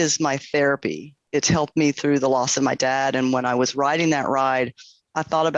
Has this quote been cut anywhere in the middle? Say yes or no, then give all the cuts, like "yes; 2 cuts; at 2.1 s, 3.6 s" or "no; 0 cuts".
yes; 1 cut; at 1.2 s